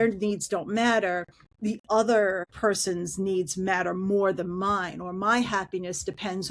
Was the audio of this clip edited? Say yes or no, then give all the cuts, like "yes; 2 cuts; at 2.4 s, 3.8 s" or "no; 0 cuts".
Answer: yes; 1 cut; at 2.5 s